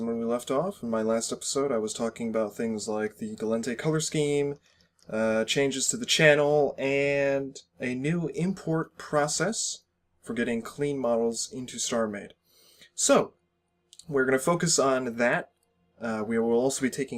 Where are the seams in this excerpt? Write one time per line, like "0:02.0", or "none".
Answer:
none